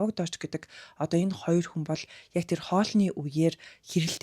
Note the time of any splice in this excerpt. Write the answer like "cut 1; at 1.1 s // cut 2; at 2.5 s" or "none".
none